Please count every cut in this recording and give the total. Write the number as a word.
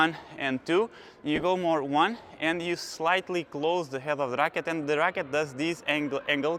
zero